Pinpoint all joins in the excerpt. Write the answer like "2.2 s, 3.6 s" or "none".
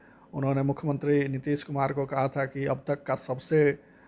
none